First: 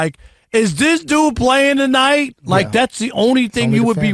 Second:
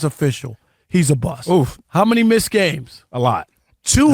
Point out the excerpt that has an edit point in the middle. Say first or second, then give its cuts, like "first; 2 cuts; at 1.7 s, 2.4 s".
second; 1 cut; at 1.9 s